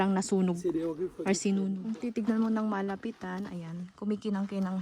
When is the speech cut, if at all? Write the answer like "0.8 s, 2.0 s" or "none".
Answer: 1.8 s